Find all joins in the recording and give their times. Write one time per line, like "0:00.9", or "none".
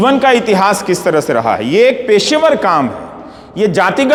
none